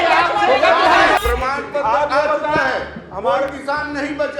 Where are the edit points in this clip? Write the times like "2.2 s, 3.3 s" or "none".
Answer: 1.2 s